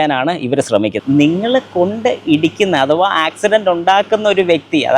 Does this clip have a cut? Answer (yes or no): yes